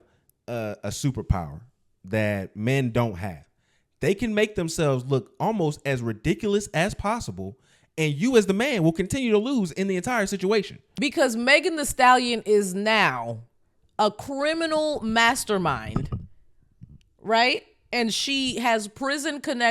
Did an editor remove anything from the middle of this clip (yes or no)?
yes